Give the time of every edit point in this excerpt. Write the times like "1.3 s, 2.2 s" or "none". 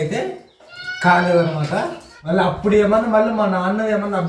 1.9 s